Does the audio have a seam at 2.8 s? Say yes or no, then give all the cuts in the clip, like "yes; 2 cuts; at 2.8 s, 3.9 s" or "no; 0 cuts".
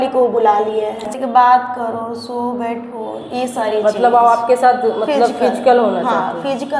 no; 1 cut; at 1.1 s